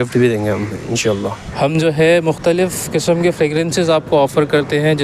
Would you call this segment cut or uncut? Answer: cut